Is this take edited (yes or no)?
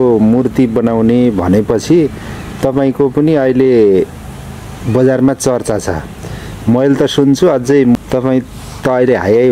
no